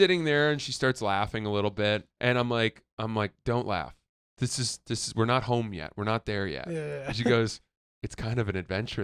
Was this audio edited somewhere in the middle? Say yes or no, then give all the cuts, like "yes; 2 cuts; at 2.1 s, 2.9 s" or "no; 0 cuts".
yes; 1 cut; at 2.1 s